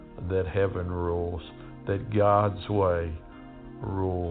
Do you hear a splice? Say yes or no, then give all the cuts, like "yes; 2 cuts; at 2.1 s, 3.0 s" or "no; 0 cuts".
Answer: no; 0 cuts